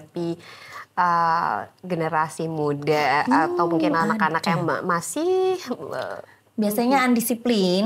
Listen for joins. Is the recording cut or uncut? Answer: uncut